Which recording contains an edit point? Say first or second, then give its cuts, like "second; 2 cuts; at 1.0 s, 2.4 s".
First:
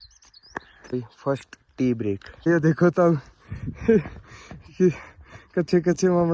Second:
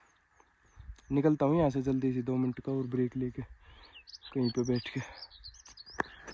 first; 1 cut; at 2.3 s